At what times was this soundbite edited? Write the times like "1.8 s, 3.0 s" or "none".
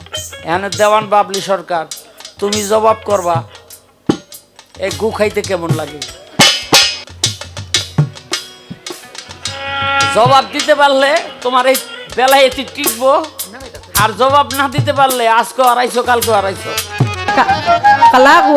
6.9 s, 17.3 s